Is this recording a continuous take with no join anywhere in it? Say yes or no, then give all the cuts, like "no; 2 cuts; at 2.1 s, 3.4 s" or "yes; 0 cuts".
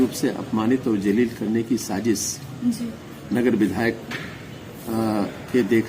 yes; 0 cuts